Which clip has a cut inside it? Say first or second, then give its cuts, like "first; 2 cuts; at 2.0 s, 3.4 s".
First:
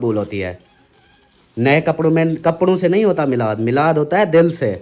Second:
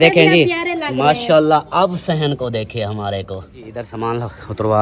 second; 1 cut; at 3.9 s